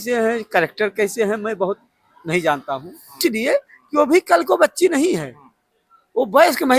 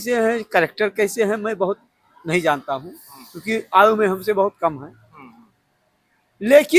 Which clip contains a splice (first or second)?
first